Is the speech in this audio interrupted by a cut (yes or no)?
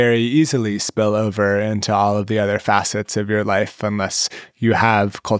no